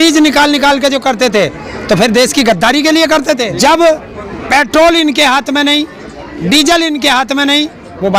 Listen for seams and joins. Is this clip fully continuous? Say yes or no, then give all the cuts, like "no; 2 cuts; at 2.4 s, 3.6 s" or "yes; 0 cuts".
no; 1 cut; at 3.5 s